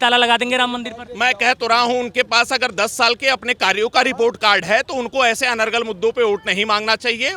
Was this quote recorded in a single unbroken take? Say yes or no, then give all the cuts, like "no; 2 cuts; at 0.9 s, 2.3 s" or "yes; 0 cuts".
yes; 0 cuts